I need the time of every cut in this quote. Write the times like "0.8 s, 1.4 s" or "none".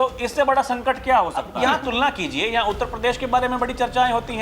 1.4 s